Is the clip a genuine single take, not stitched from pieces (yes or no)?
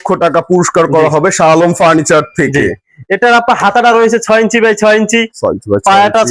yes